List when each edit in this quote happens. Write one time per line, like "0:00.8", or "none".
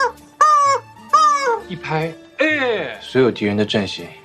0:03.0